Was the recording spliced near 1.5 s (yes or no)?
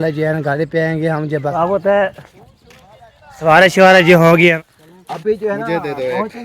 yes